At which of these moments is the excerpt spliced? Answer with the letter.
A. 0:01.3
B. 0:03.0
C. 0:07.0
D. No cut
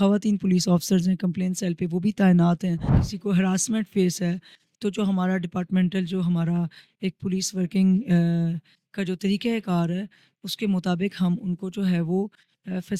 B